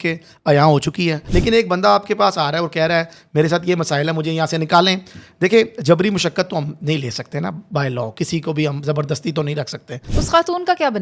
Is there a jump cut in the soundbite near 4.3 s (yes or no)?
no